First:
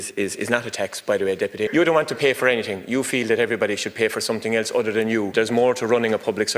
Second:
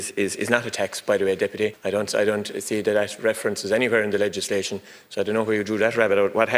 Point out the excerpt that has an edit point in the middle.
first; 2 cuts; at 1.7 s, 5.3 s

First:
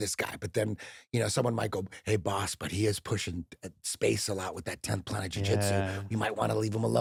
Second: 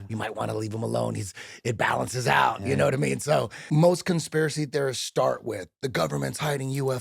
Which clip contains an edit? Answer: second; 1 cut; at 3.6 s

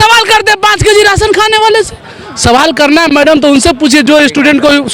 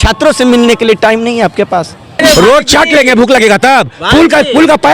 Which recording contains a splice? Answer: second; 1 cut; at 2.2 s

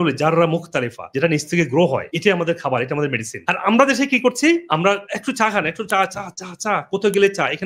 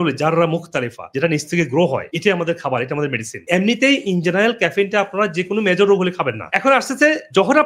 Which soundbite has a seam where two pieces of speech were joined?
second; 1 cut; at 3.3 s

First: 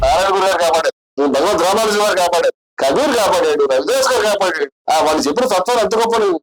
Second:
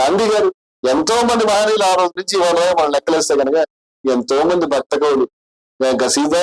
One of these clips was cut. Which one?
first; 3 cuts; at 1.0 s, 2.7 s, 4.7 s

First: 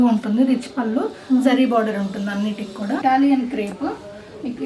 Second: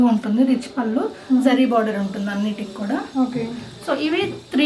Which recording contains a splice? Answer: first; 1 cut; at 3.0 s

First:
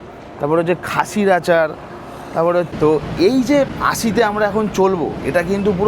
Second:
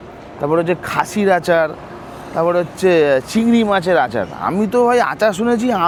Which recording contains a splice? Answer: first; 2 cuts; at 2.7 s, 3.8 s

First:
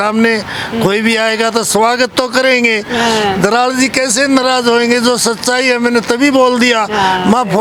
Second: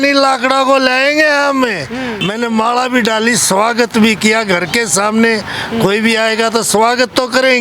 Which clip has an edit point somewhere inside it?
second; 1 cut; at 2.2 s

